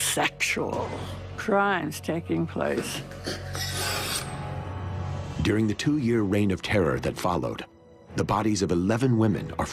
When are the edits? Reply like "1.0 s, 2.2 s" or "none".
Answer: 6.6 s

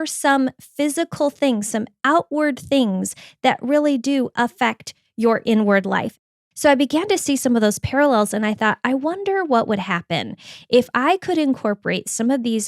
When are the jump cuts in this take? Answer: 6.1 s

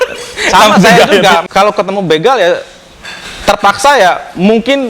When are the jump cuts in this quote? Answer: 1.5 s

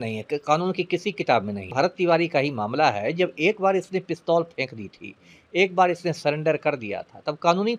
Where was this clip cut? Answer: 1.7 s

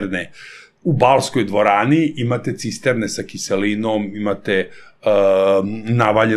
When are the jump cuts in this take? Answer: none

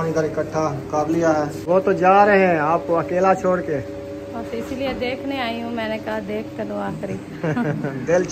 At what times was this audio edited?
1.6 s

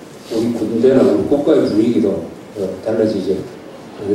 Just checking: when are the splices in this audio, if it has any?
2.6 s

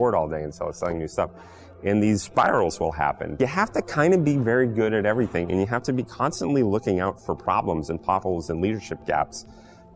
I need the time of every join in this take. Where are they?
3.3 s

